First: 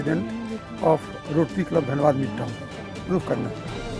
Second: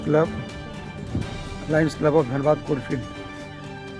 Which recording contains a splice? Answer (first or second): first